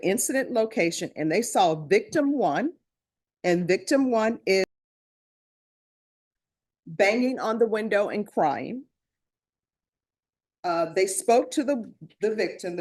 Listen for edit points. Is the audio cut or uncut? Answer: uncut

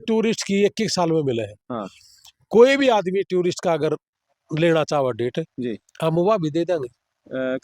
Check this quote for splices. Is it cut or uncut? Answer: uncut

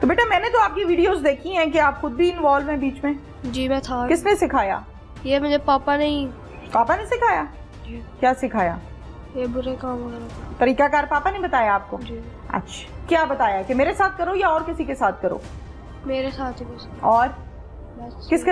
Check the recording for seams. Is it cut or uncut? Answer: uncut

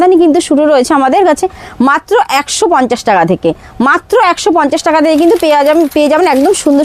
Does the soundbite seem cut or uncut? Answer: uncut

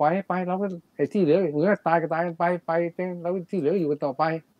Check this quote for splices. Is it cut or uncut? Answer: uncut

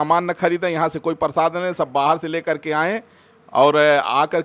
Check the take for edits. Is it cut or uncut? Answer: uncut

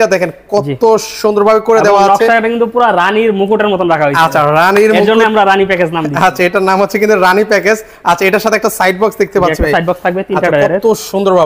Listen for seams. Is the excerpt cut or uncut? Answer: uncut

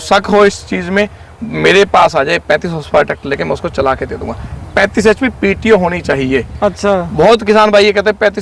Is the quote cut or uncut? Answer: uncut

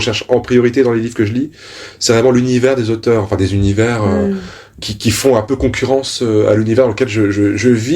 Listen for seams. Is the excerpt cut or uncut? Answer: uncut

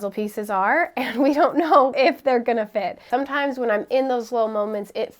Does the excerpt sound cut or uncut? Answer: cut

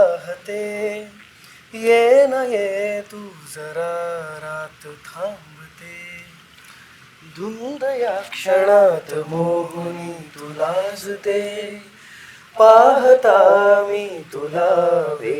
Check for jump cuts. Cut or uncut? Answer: uncut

